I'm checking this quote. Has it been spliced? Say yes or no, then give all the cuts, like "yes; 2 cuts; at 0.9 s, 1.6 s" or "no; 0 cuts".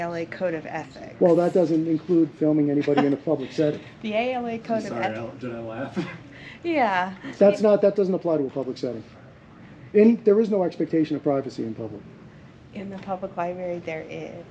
yes; 1 cut; at 1.3 s